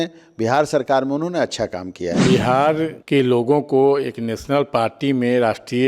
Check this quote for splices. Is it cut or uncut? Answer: cut